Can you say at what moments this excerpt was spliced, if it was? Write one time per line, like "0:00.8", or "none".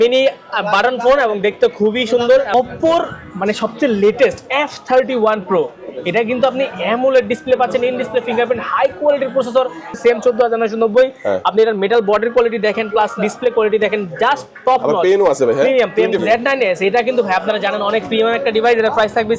0:02.5
0:09.9
0:16.2